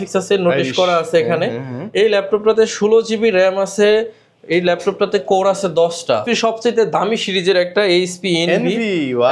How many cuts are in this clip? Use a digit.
1